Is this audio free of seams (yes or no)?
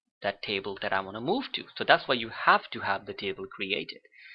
yes